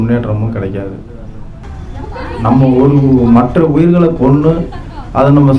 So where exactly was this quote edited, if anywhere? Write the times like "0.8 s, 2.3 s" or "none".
1.8 s

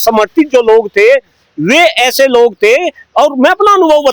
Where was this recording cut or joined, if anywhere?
none

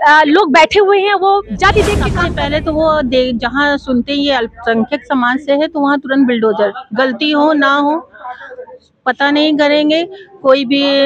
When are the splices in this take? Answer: 2.2 s

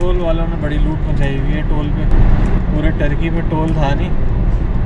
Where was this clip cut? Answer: none

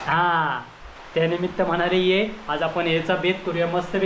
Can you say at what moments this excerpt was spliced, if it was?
1.0 s

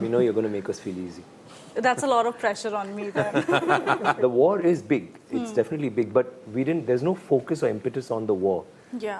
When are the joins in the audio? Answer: 4.2 s

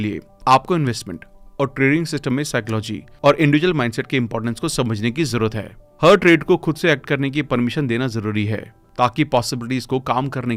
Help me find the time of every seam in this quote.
none

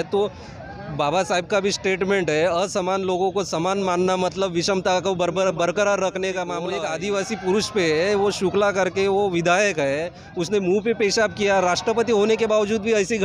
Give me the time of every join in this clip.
6.8 s

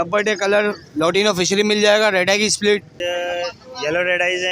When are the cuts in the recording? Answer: 2.9 s

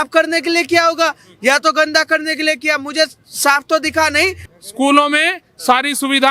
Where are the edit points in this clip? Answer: 4.5 s

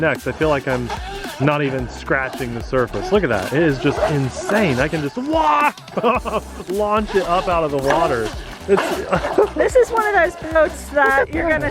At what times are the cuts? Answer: none

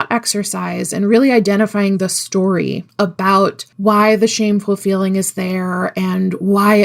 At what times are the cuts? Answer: 2.9 s, 3.7 s

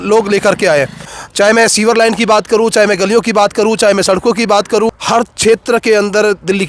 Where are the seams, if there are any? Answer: 1.1 s, 5.0 s

